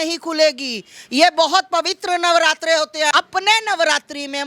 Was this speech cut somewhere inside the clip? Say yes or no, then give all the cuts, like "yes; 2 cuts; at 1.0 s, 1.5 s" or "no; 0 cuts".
yes; 1 cut; at 3.1 s